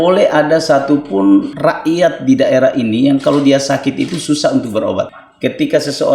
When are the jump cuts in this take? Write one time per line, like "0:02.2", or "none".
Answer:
0:01.5
0:05.2